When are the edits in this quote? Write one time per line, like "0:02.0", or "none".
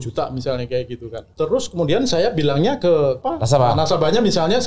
0:01.2
0:03.2